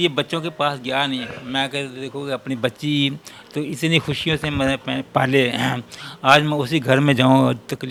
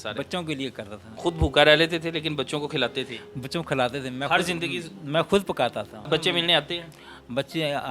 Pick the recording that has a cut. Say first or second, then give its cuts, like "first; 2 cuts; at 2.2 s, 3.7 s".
second; 2 cuts; at 1.1 s, 6.1 s